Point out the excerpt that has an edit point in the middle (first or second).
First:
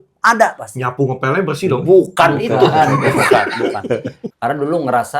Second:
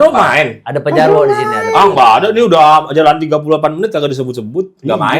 first